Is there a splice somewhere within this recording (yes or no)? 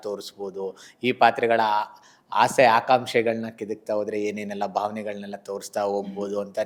no